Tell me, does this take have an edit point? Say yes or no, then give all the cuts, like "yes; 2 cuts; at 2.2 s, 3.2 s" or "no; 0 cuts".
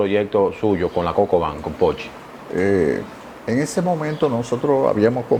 no; 0 cuts